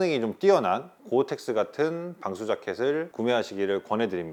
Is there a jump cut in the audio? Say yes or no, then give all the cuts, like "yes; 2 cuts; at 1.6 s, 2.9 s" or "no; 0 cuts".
no; 0 cuts